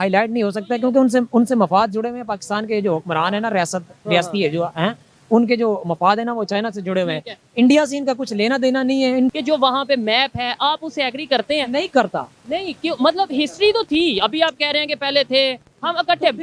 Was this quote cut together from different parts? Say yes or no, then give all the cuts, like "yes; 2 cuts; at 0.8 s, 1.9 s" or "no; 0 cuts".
yes; 1 cut; at 9.3 s